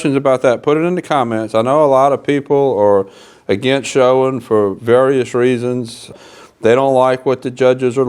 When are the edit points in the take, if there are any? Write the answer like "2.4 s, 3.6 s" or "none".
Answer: 6.2 s